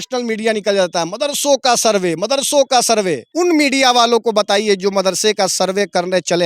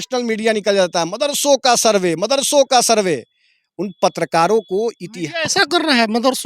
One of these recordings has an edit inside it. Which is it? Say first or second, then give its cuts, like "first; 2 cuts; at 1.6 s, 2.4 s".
first; 1 cut; at 3.3 s